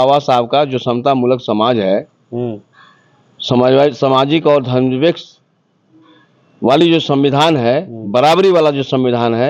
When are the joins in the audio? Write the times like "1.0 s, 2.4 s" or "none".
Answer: none

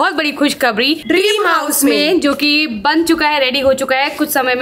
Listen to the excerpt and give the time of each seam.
1.0 s

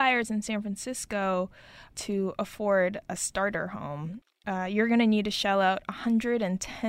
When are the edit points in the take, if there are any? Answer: none

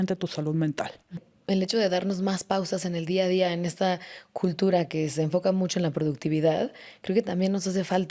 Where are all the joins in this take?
1.3 s

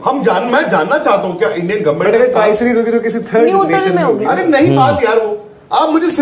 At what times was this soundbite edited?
none

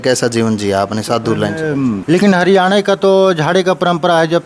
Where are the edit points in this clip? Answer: 2.0 s

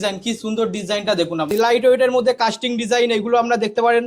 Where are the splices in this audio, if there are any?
1.5 s

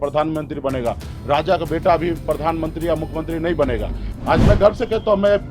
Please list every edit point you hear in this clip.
4.1 s

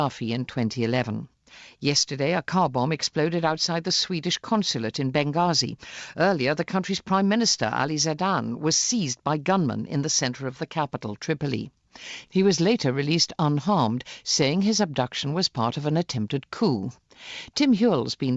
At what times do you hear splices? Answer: 9.8 s

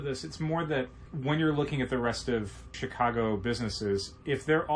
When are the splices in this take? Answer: 1.1 s, 2.8 s

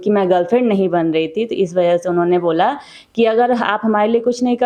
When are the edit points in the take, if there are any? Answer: none

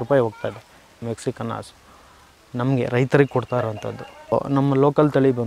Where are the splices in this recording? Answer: 1.0 s, 4.3 s

